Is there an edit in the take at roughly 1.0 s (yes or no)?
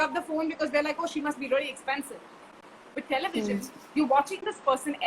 no